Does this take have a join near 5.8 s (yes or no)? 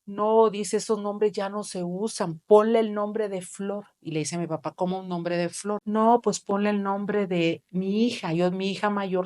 yes